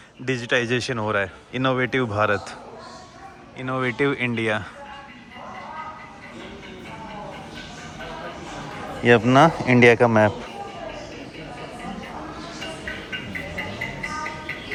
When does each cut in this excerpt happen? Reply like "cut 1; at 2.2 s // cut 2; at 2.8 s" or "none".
none

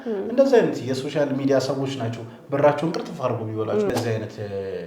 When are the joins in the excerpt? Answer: cut 1; at 3.9 s

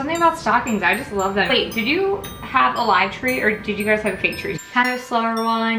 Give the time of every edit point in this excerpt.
cut 1; at 1.5 s // cut 2; at 4.5 s

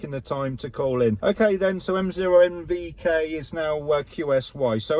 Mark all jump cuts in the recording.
cut 1; at 1.2 s

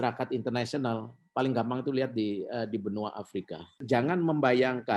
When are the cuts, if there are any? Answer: cut 1; at 3.8 s

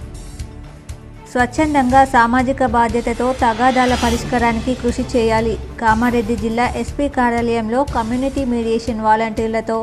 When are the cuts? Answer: cut 1; at 1.3 s

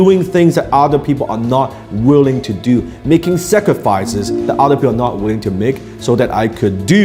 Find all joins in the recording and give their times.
none

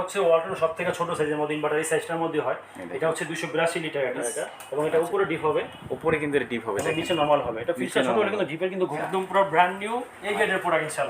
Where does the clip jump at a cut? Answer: cut 1; at 4.2 s // cut 2; at 8.9 s

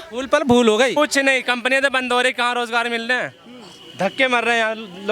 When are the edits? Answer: cut 1; at 1.0 s

